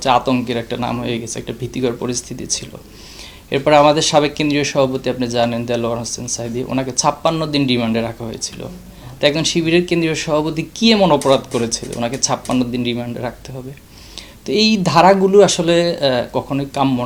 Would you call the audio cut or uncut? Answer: uncut